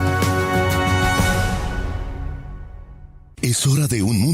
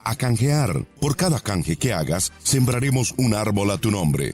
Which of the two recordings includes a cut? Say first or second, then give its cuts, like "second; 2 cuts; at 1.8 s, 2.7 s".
first; 1 cut; at 3.3 s